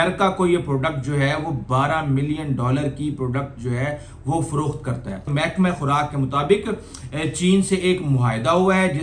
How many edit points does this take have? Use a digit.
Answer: 1